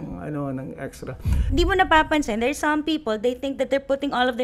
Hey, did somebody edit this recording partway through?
yes; 1 cut; at 1.4 s

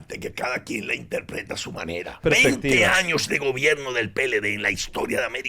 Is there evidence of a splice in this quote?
yes; 1 cut; at 2.2 s

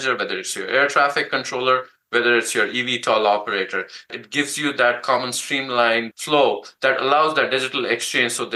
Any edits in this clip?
yes; 2 cuts; at 4.2 s, 6.2 s

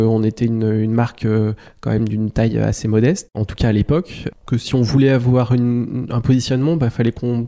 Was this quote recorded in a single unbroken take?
yes; 0 cuts

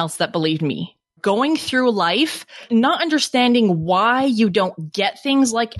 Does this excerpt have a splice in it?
yes; 2 cuts; at 1.1 s, 2.6 s

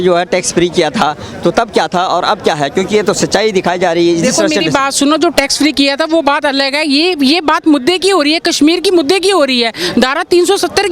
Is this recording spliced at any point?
no; 0 cuts

